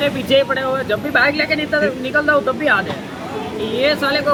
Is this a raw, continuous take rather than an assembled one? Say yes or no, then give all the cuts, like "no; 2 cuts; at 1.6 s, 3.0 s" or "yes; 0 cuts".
yes; 0 cuts